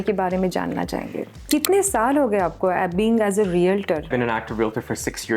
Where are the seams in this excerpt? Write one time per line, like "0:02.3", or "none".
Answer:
0:01.4
0:04.1